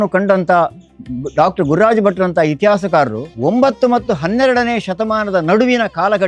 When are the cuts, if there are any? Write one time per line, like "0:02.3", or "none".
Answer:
0:03.2

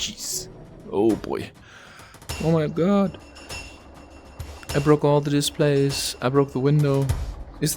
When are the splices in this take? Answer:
0:02.3

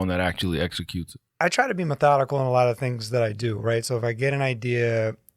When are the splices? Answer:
0:01.3

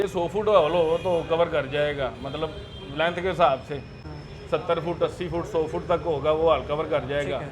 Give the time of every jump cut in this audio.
none

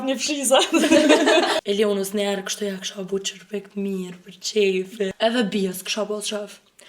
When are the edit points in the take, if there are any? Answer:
0:01.5
0:05.1

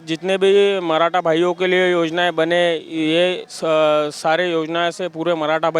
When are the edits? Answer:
none

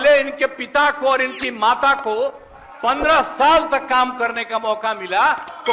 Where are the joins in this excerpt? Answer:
none

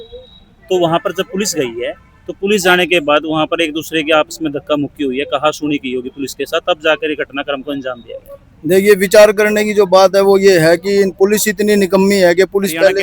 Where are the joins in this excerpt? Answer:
none

